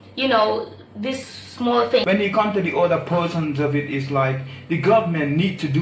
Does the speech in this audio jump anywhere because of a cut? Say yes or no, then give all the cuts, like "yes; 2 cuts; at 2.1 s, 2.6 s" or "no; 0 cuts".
yes; 1 cut; at 2.0 s